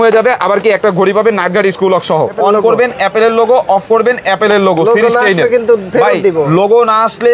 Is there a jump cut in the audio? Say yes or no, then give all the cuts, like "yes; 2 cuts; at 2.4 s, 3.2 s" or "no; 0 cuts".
yes; 1 cut; at 2.4 s